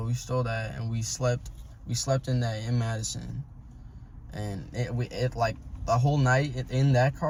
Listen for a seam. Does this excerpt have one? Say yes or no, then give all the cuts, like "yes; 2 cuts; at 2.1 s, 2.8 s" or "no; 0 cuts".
no; 0 cuts